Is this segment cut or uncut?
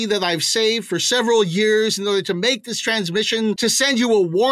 cut